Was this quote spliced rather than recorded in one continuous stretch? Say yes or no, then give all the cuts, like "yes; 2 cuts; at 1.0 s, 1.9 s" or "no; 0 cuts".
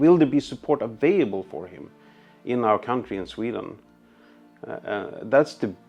no; 0 cuts